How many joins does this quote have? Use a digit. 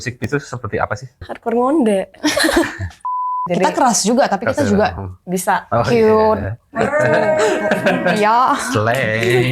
2